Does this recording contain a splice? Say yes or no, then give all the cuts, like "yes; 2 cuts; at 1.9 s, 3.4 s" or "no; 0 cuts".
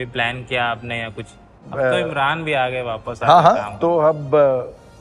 yes; 1 cut; at 1.7 s